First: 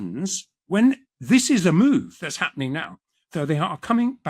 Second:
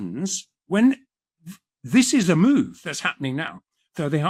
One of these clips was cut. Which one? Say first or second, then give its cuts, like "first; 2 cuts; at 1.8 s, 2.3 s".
first; 1 cut; at 1.1 s